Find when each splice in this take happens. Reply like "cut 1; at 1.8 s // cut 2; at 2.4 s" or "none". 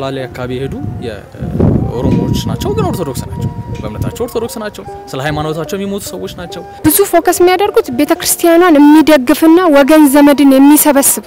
cut 1; at 6.7 s